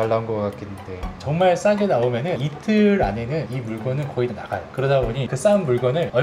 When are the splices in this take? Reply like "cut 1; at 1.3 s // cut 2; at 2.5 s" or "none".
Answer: cut 1; at 1.1 s